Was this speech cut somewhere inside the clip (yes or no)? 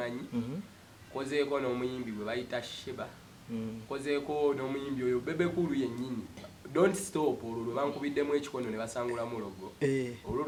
no